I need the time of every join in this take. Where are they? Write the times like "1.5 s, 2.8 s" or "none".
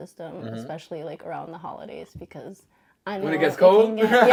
none